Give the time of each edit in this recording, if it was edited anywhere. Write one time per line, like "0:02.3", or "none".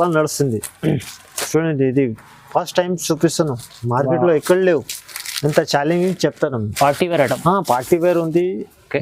none

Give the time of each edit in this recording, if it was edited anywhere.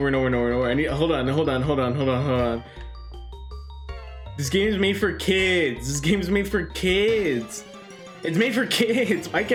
none

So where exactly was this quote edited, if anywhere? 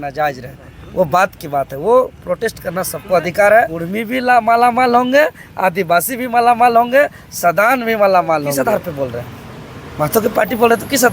0:03.8
0:08.5

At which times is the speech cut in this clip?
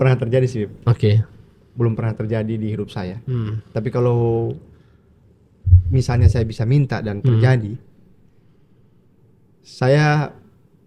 none

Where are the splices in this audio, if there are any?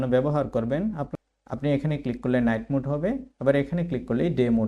0:01.0

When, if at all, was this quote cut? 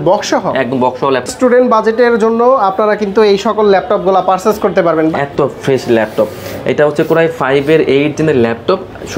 0:01.3
0:05.1

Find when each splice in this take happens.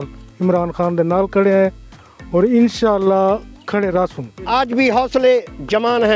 0:04.4

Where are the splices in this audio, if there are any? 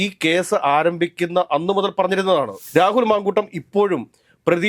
0:02.6

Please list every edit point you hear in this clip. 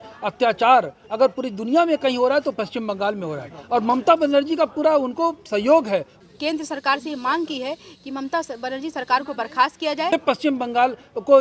0:06.1
0:10.1

